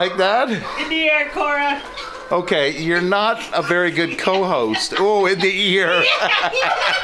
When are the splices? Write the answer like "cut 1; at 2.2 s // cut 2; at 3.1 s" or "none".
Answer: none

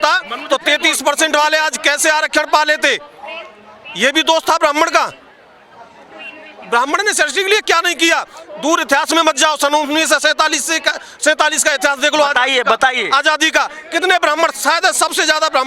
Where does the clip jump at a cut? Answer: none

